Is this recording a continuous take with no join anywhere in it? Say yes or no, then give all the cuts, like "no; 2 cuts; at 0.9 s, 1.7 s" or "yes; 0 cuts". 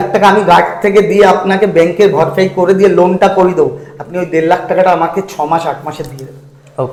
yes; 0 cuts